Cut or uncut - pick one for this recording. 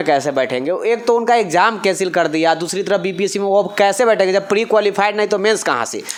uncut